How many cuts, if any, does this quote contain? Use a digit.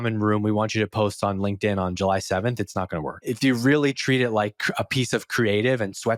0